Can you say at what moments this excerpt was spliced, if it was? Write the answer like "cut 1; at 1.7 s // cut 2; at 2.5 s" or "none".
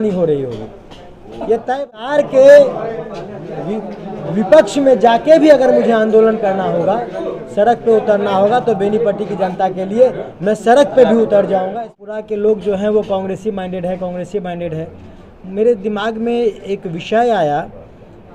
cut 1; at 2.1 s // cut 2; at 11.8 s